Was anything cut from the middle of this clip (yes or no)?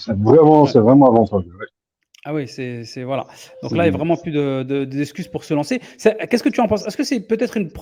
no